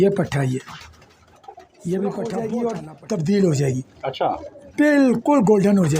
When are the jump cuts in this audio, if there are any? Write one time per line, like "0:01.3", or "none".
0:02.4